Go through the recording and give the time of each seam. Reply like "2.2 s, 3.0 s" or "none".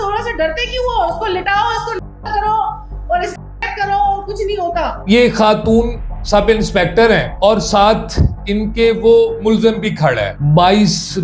5.0 s, 10.3 s